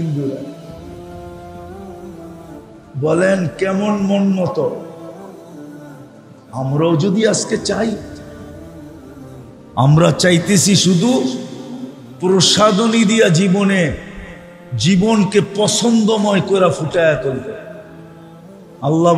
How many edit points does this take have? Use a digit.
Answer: 2